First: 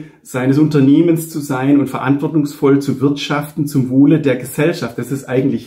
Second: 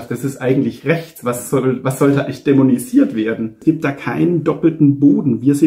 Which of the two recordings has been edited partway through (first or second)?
second